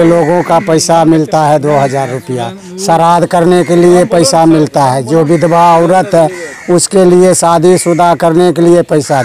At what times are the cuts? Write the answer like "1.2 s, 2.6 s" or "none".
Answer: none